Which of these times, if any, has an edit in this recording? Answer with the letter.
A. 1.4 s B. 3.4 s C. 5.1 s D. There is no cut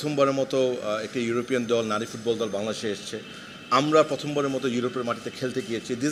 D